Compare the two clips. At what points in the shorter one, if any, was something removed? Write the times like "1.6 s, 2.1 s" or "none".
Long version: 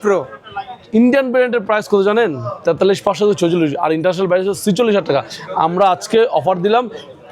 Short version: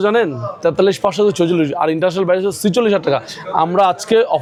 none